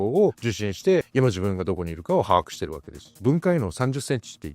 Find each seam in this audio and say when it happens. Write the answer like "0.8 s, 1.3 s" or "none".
1.1 s, 3.1 s